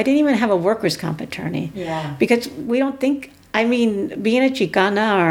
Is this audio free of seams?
yes; 0 cuts

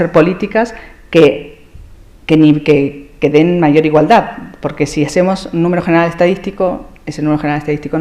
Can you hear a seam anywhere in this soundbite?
yes; 1 cut; at 5.8 s

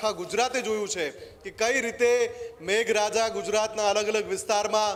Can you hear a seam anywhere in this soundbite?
no; 0 cuts

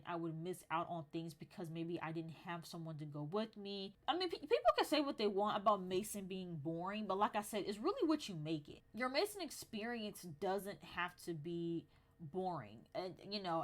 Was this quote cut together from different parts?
yes; 2 cuts; at 4.0 s, 8.8 s

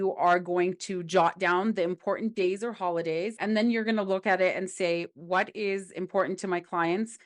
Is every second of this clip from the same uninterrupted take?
no; 1 cut; at 3.4 s

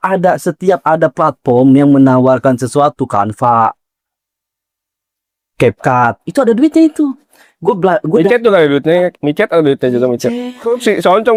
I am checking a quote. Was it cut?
no; 0 cuts

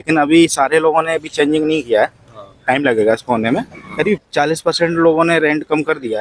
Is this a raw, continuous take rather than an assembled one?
no; 1 cut; at 3.8 s

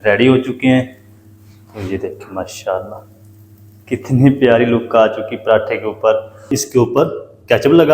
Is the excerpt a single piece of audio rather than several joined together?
no; 1 cut; at 6.5 s

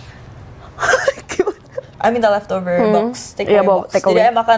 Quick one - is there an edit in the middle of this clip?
yes; 1 cut; at 1.9 s

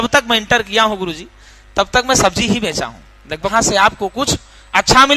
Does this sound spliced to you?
yes; 1 cut; at 3.5 s

